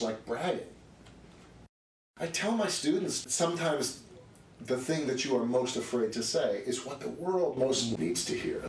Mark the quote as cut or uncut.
cut